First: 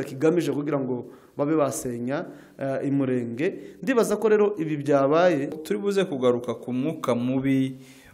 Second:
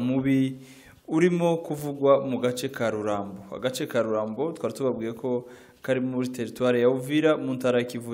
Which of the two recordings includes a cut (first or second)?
first